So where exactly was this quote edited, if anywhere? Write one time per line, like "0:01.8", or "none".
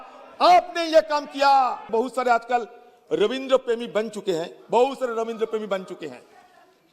0:01.9